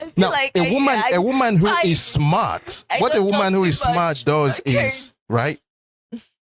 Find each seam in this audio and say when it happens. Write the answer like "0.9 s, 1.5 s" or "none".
none